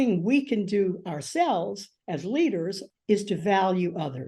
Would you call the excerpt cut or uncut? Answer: cut